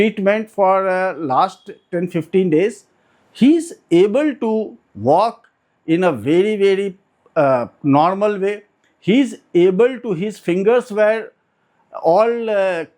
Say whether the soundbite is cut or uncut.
uncut